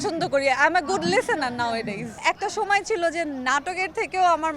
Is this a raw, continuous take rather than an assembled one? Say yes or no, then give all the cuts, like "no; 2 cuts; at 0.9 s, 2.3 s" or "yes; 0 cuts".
no; 1 cut; at 2.2 s